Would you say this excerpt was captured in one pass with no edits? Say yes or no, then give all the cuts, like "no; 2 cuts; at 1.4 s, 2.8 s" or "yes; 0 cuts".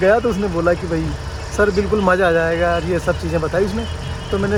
yes; 0 cuts